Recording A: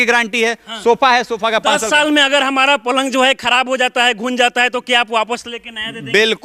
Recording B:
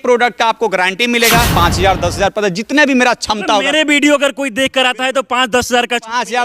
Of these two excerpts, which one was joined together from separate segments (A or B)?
B